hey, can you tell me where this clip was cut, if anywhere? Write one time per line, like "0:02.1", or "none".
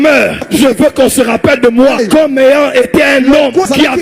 none